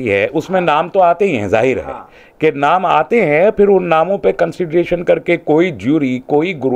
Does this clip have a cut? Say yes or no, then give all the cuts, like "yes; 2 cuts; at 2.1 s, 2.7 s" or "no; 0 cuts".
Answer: no; 0 cuts